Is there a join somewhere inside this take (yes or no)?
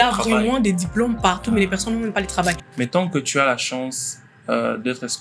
yes